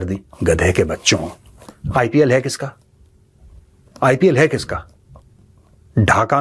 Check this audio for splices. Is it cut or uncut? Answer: uncut